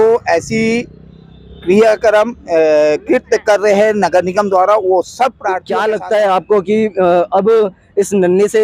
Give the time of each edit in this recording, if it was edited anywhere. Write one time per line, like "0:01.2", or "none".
0:05.5